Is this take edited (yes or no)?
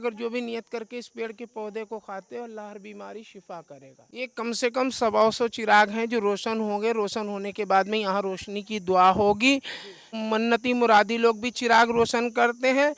yes